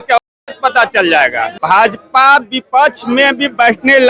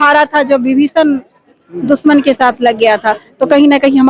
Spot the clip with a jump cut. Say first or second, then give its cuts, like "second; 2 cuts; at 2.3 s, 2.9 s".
first; 1 cut; at 1.5 s